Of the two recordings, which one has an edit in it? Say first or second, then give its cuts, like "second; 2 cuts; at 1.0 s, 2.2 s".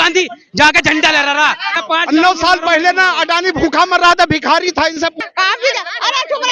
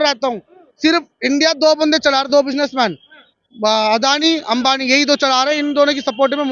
first; 2 cuts; at 1.8 s, 5.1 s